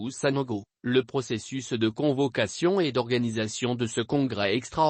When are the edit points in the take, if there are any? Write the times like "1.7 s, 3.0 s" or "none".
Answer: 4.0 s